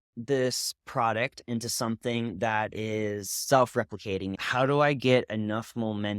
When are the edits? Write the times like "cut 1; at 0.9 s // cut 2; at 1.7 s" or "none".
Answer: cut 1; at 4.4 s